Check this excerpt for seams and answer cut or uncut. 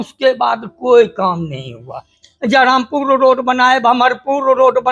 cut